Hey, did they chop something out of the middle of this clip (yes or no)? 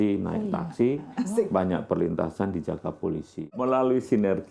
yes